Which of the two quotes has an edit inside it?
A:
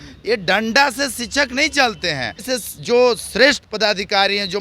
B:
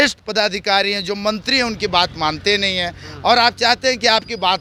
A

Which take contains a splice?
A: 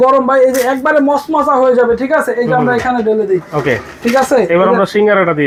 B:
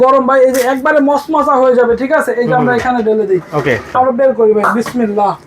B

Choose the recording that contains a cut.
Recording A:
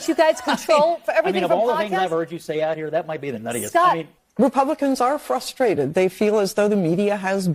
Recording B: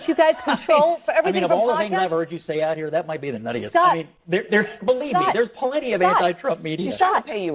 A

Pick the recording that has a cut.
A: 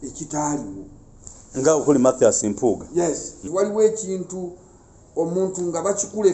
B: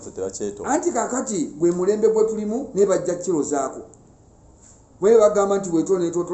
A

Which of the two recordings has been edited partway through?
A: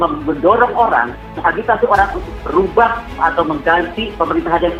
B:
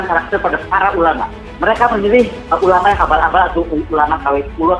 B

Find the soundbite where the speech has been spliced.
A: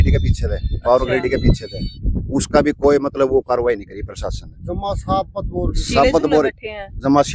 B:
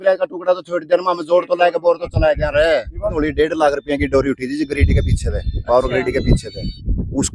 B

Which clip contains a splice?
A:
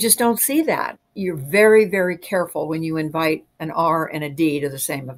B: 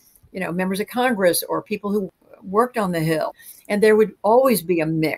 B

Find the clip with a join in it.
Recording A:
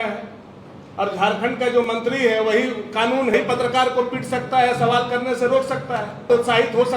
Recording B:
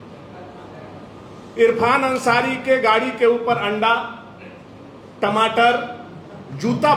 A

